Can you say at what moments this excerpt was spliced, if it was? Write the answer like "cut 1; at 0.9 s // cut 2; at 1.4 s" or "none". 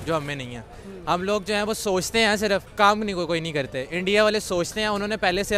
cut 1; at 2.7 s